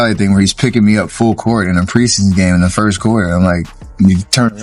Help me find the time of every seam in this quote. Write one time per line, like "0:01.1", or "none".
none